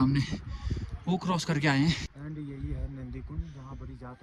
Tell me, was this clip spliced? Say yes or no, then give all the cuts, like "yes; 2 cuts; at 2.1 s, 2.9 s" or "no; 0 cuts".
yes; 1 cut; at 2.0 s